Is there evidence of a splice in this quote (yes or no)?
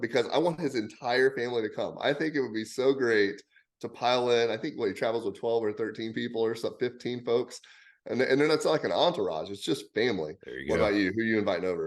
yes